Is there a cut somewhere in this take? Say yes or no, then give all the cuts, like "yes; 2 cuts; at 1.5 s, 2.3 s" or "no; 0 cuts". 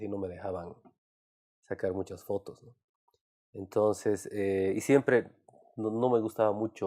yes; 1 cut; at 4.1 s